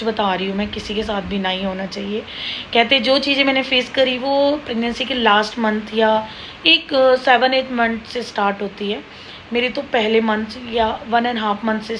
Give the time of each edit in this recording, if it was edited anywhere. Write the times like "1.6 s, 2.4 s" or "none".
none